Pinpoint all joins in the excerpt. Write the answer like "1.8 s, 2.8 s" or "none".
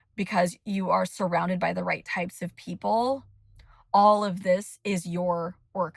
none